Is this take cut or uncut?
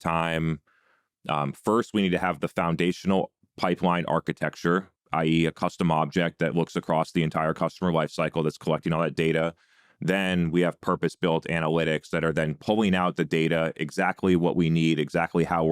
cut